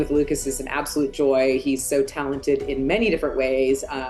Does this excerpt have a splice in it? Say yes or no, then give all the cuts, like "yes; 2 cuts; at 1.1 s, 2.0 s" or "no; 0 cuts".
no; 0 cuts